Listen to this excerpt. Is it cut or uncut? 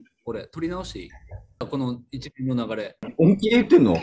cut